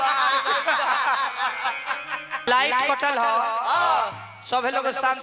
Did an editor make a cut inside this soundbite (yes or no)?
yes